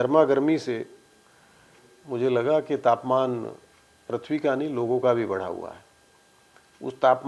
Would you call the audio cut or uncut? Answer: uncut